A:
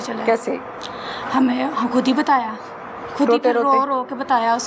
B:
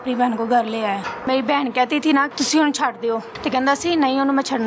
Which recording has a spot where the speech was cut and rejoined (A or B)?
B